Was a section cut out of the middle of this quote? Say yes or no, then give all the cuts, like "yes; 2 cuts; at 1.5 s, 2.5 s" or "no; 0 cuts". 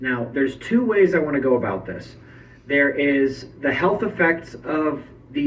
no; 0 cuts